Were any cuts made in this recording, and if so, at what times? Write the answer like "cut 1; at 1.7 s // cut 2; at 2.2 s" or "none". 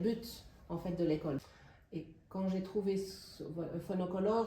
cut 1; at 1.4 s